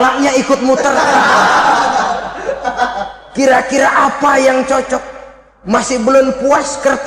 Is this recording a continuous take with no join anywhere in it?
yes; 0 cuts

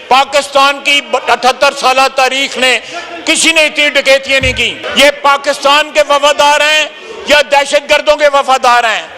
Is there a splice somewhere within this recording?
yes; 1 cut; at 4.8 s

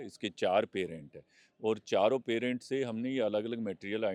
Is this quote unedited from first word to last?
yes; 0 cuts

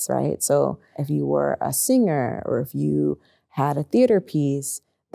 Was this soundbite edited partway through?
yes; 1 cut; at 1.0 s

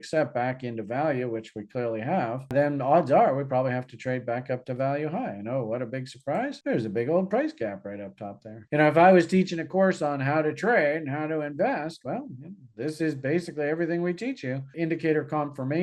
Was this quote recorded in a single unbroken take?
no; 2 cuts; at 8.6 s, 14.7 s

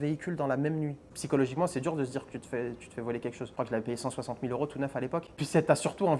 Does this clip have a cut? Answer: yes; 2 cuts; at 1.1 s, 3.5 s

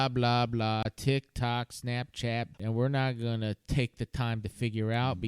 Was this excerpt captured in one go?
no; 1 cut; at 2.6 s

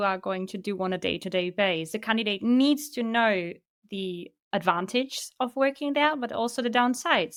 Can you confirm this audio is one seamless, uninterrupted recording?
yes; 0 cuts

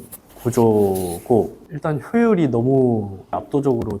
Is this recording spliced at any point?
yes; 1 cut; at 1.6 s

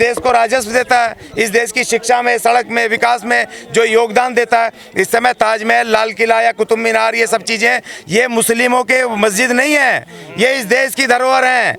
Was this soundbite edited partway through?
no; 0 cuts

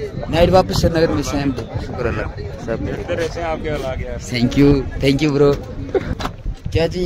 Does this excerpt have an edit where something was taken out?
yes; 1 cut; at 6.1 s

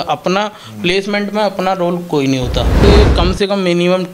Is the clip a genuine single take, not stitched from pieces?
no; 1 cut; at 2.8 s

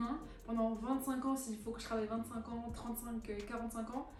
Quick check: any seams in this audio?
no; 0 cuts

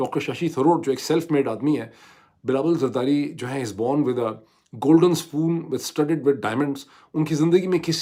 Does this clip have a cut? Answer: no; 0 cuts

